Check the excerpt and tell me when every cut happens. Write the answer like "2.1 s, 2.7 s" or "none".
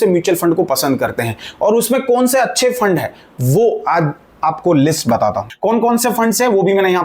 5.5 s